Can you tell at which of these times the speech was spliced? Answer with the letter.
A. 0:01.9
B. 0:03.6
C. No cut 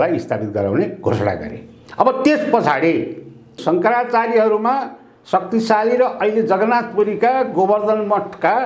B